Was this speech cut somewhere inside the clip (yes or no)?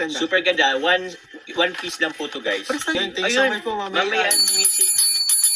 no